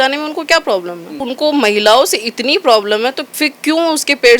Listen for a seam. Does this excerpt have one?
yes; 2 cuts; at 1.3 s, 3.2 s

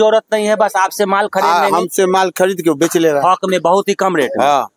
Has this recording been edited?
no; 0 cuts

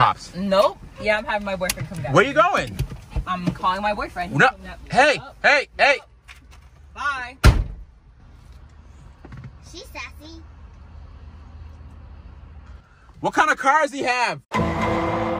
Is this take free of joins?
no; 1 cut; at 14.4 s

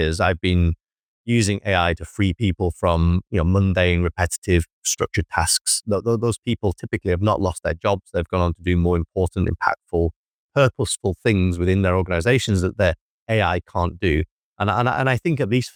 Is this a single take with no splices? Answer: yes; 0 cuts

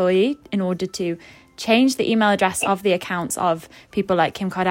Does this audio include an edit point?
no; 0 cuts

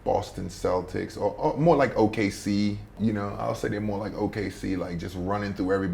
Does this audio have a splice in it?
yes; 1 cut; at 2.9 s

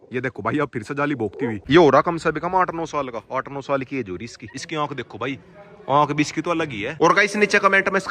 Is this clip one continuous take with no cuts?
no; 3 cuts; at 1.6 s, 4.5 s, 6.9 s

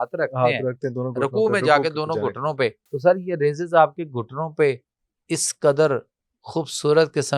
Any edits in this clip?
yes; 1 cut; at 2.9 s

